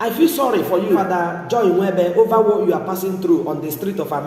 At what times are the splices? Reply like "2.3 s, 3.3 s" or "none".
1.0 s